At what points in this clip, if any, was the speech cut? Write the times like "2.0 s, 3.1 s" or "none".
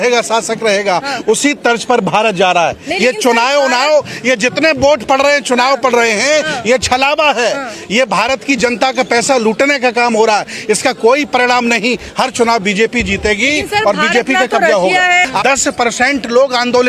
15.3 s